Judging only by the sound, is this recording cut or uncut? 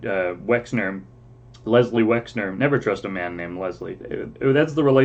cut